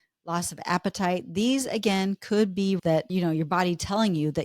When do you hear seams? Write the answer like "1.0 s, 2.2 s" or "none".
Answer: 2.8 s